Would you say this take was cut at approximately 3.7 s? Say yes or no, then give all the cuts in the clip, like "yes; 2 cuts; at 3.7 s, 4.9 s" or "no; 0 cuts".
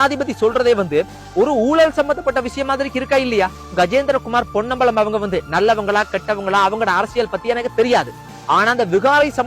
yes; 1 cut; at 3.7 s